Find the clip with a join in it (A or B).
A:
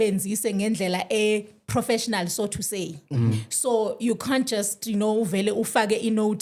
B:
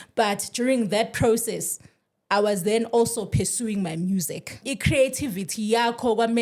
B